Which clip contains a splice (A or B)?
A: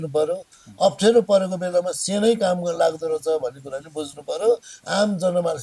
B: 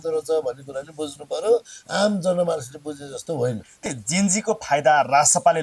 B